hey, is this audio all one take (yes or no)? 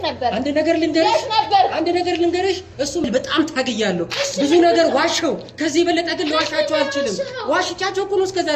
no